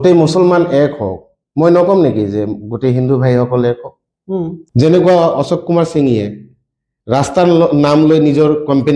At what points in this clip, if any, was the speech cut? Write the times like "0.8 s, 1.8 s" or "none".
4.6 s